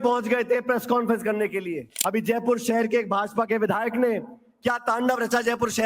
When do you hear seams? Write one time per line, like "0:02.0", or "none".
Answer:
0:01.8